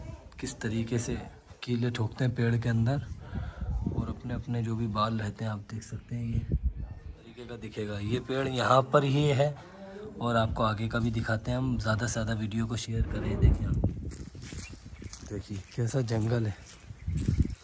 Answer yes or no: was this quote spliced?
yes